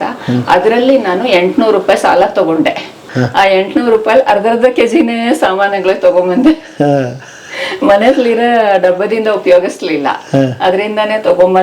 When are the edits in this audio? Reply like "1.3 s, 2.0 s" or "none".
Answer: 3.1 s